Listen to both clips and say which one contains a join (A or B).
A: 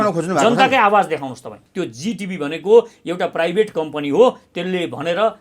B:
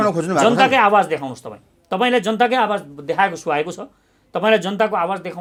A